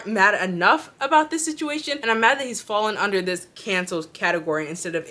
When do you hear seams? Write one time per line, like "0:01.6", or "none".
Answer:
none